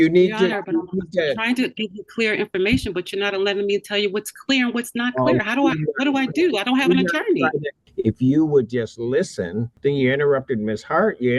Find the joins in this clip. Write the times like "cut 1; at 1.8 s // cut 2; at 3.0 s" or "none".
cut 1; at 7.8 s // cut 2; at 9.7 s